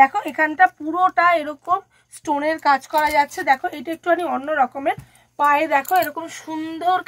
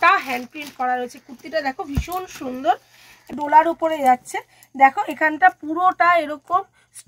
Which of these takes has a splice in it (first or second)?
second